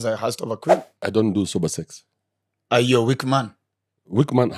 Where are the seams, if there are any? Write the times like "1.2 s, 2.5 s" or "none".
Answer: 1.0 s